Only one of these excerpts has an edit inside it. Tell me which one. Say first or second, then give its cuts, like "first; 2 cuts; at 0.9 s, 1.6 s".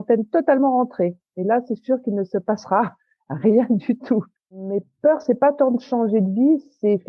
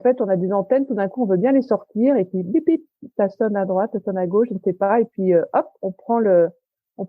first; 1 cut; at 4.6 s